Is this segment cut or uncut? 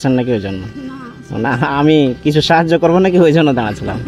uncut